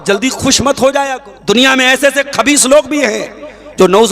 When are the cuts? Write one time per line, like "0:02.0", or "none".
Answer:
0:01.3